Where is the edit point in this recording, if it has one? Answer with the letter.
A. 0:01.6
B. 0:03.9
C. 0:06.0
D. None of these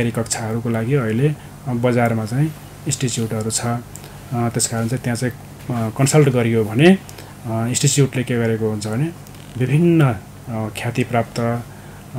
D